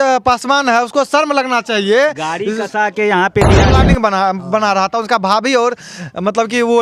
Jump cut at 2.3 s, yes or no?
no